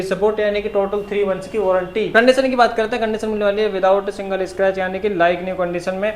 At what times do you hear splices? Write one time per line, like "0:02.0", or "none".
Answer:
0:02.1